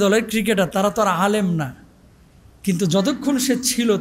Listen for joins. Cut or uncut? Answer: uncut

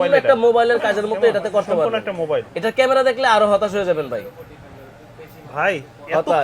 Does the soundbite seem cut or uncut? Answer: cut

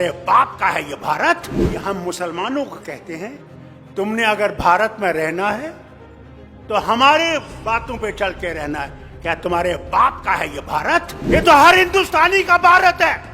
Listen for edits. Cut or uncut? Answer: cut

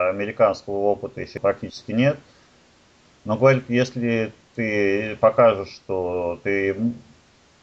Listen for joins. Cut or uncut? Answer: uncut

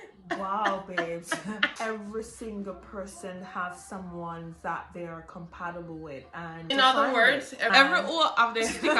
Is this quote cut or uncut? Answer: cut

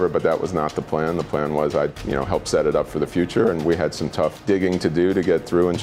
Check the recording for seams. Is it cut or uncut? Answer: cut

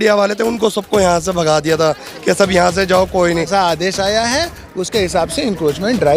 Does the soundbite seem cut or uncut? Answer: cut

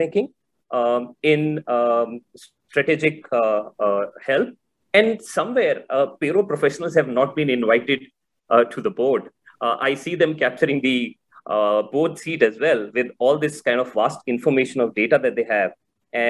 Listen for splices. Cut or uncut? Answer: uncut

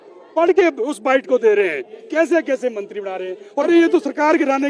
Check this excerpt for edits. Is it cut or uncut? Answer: cut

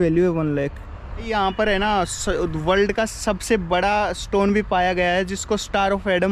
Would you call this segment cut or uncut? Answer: cut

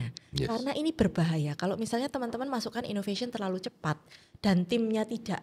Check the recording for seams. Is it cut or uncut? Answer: uncut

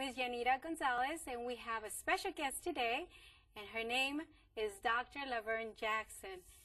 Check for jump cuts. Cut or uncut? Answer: cut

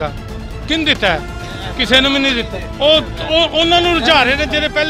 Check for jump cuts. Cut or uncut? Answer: uncut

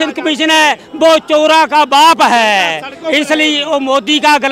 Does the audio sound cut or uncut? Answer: uncut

